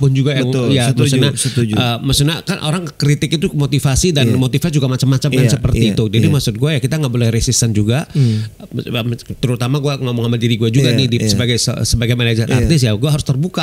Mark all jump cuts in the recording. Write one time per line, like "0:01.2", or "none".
none